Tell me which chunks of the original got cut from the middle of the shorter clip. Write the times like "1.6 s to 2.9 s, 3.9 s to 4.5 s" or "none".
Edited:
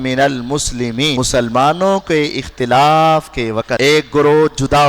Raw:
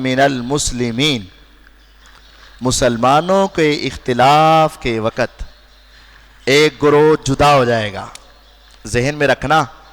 1.1 s to 2.6 s, 5.2 s to 6.4 s